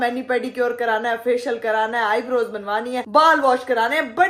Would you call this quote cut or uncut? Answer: uncut